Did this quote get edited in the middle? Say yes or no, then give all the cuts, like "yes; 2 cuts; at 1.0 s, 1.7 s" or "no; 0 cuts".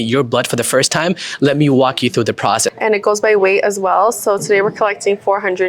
yes; 1 cut; at 2.7 s